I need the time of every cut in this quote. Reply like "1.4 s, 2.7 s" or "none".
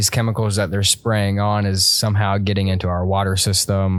none